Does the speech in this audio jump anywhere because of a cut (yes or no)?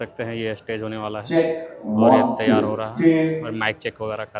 no